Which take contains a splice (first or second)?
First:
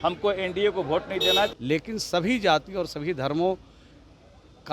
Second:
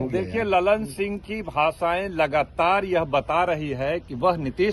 first